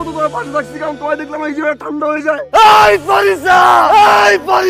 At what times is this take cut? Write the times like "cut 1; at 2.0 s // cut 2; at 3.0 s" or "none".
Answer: cut 1; at 2.5 s